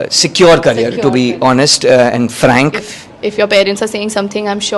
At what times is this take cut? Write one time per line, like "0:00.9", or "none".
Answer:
0:02.8